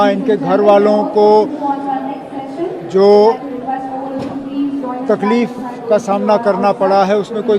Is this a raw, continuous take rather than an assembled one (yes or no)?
yes